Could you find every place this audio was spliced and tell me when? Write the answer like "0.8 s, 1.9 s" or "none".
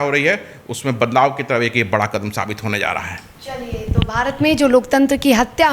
none